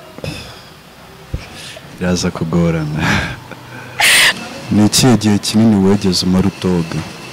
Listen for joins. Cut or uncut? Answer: cut